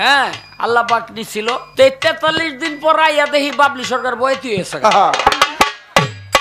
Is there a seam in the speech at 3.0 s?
no; 1 cut; at 1.7 s

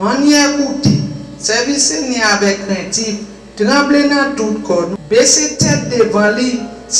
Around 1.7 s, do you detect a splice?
no; 1 cut; at 4.9 s

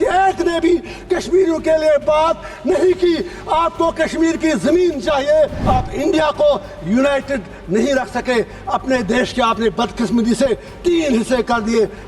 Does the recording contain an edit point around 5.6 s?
yes; 1 cut; at 5.6 s

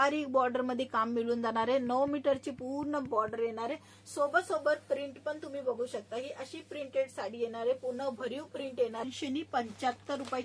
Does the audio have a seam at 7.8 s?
no; 1 cut; at 9.0 s

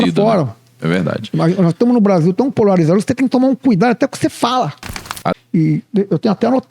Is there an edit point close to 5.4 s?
yes; 1 cut; at 5.4 s

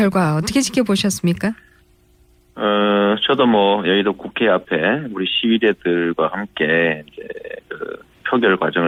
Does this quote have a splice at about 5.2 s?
no; 0 cuts

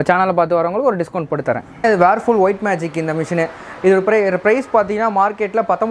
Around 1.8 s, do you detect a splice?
yes; 1 cut; at 1.8 s

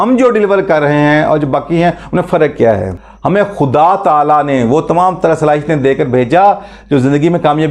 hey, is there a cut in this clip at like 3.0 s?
yes; 1 cut; at 3.0 s

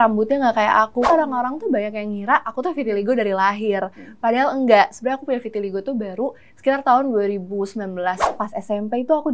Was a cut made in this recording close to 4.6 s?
no; 2 cuts; at 1.1 s, 8.3 s

